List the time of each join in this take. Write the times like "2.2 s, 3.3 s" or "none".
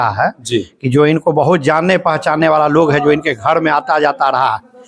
none